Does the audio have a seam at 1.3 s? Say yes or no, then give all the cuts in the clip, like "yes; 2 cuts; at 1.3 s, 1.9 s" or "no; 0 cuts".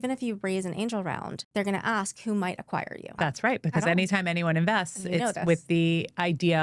yes; 2 cuts; at 1.3 s, 3.1 s